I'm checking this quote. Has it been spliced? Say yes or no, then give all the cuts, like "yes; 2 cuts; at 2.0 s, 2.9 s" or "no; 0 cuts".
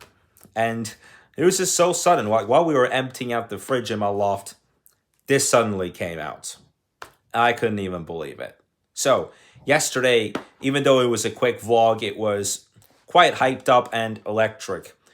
no; 0 cuts